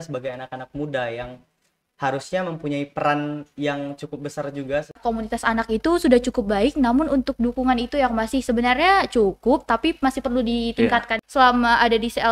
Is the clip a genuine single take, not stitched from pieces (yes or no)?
no